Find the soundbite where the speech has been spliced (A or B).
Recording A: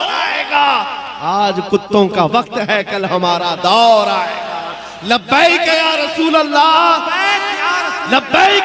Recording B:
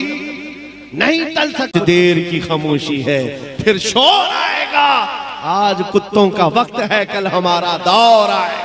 B